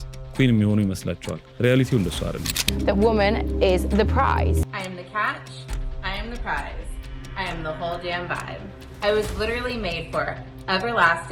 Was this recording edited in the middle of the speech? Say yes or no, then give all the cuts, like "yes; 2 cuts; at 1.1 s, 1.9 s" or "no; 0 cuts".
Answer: yes; 1 cut; at 2.5 s